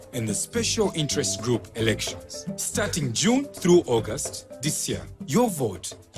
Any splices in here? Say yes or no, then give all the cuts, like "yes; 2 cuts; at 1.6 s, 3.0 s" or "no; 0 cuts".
no; 0 cuts